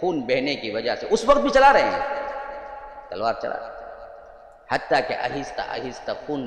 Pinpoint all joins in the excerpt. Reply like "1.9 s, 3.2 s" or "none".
none